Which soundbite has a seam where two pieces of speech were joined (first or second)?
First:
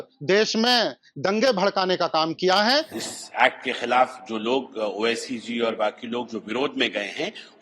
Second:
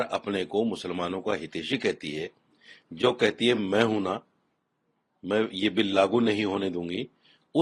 first